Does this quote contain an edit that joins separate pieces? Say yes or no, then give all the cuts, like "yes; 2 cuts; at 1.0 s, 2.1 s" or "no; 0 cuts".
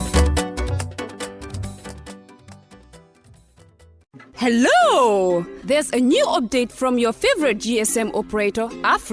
yes; 1 cut; at 3.9 s